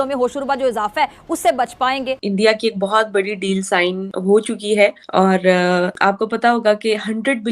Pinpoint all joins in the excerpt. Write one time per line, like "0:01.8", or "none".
0:02.2
0:04.1
0:05.0
0:05.9